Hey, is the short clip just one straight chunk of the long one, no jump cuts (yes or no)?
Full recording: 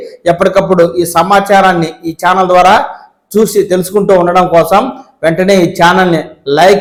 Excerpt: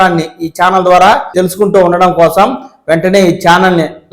no